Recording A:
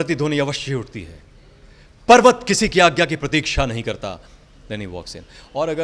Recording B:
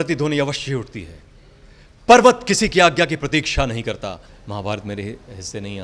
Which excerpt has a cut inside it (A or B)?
B